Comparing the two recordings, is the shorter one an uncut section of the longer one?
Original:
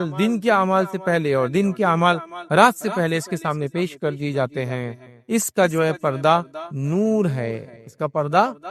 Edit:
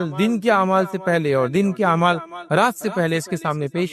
yes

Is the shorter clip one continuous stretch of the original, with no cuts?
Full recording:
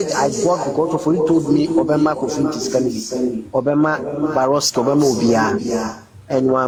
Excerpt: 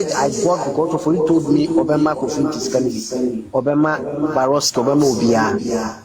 yes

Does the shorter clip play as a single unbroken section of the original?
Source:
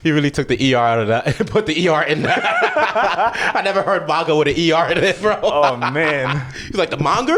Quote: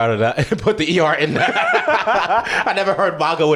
yes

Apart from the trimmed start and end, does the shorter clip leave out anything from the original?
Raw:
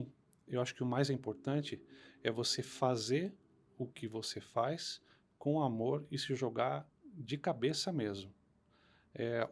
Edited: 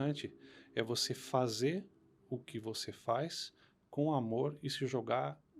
no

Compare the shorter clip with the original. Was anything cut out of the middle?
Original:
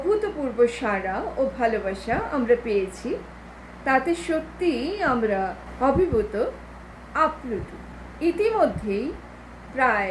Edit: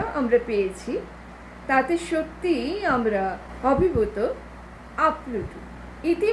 no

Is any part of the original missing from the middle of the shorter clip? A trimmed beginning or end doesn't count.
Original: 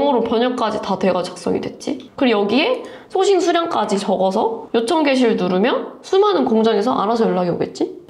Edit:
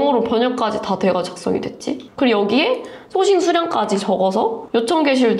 no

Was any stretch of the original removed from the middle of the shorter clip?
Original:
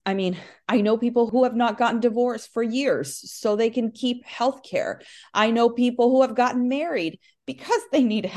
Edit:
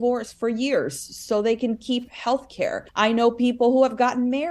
yes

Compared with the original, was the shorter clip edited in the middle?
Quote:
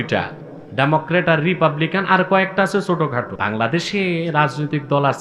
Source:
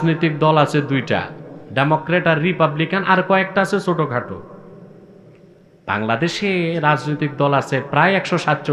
yes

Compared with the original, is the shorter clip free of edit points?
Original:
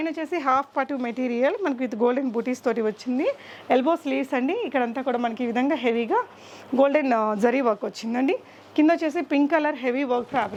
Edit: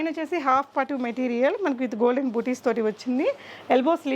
yes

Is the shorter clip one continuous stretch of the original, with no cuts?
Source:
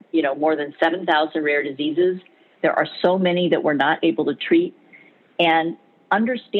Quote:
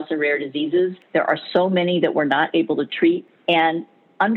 no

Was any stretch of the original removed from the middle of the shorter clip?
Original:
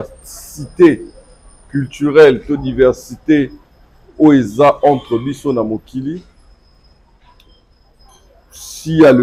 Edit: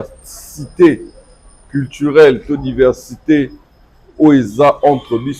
no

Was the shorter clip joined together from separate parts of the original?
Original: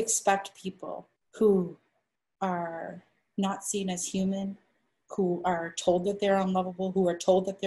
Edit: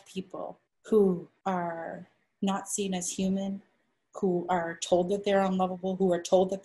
yes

